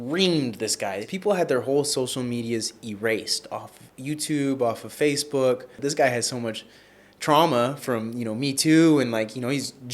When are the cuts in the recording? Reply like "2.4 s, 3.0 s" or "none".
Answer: 1.1 s, 5.7 s

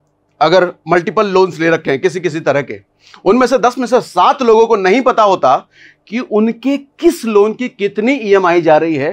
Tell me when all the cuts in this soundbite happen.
none

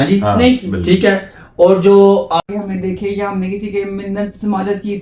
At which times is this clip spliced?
2.4 s

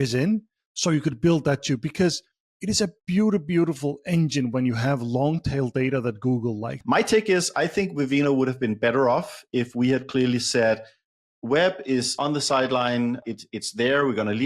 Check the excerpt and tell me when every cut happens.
6.7 s, 12.1 s, 13.2 s

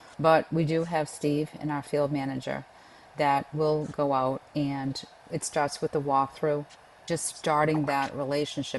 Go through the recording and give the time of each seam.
5.1 s, 7.1 s

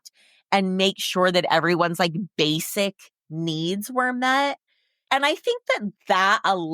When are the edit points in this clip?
none

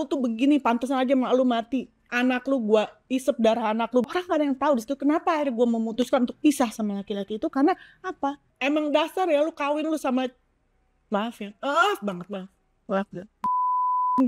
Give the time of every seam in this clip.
2.0 s, 4.1 s, 8.5 s

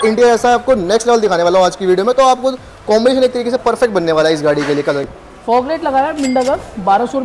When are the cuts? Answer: 5.1 s

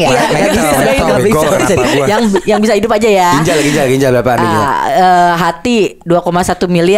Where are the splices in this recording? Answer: none

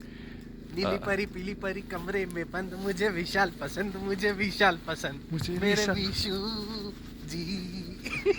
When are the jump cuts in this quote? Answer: none

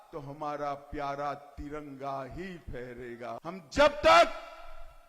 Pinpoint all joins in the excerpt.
3.4 s

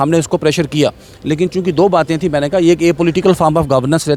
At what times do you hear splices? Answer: none

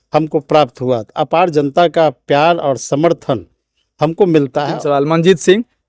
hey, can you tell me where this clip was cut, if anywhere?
4.7 s

